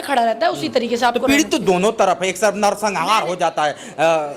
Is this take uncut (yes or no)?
yes